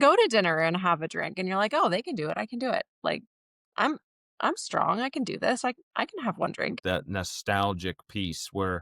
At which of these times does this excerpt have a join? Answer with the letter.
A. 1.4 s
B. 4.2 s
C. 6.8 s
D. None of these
C